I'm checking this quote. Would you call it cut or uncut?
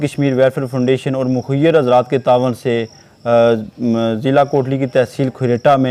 uncut